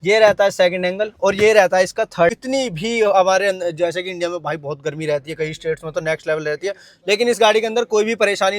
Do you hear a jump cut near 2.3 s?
yes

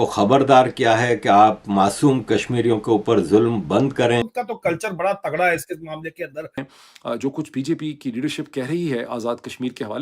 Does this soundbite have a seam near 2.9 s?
no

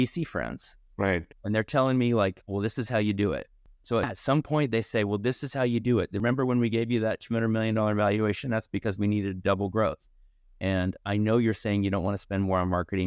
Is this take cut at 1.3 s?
no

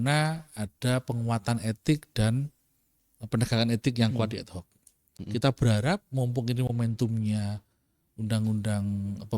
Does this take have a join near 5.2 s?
yes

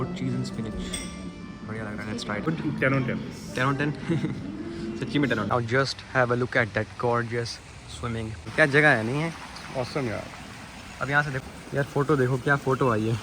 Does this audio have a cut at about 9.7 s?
no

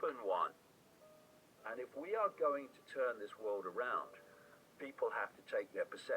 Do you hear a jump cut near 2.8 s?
no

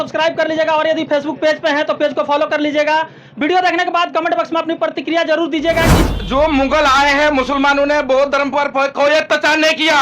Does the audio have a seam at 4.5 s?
no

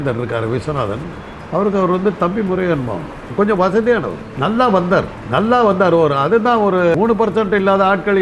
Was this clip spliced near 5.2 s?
yes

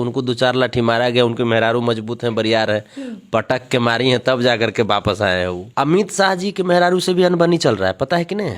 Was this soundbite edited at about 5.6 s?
yes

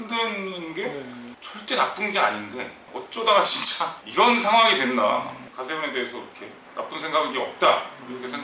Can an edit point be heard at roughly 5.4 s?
yes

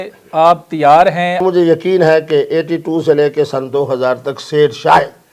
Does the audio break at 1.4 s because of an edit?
yes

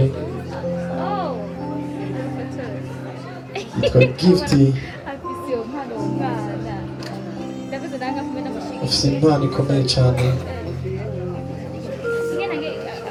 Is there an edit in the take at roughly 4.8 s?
no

